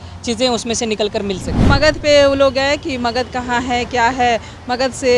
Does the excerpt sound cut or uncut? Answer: cut